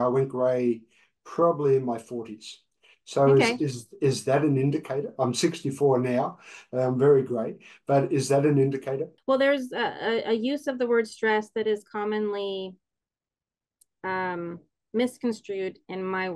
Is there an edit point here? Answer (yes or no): yes